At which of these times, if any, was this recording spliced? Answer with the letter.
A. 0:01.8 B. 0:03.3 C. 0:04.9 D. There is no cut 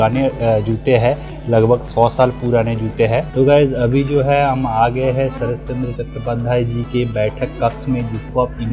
D